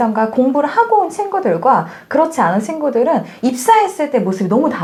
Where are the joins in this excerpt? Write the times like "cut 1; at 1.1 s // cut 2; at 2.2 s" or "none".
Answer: none